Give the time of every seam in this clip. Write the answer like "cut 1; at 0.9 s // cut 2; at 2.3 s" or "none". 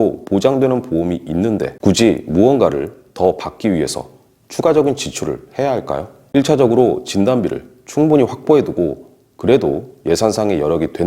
cut 1; at 1.7 s // cut 2; at 6.2 s